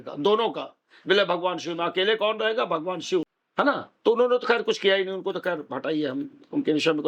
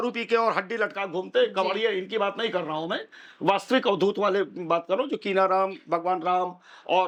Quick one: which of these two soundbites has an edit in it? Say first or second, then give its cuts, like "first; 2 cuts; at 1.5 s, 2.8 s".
first; 1 cut; at 3.4 s